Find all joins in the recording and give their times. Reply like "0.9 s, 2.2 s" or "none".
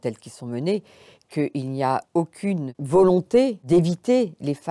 2.7 s, 3.6 s